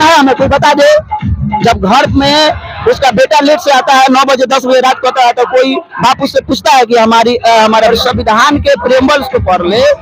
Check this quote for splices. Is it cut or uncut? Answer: cut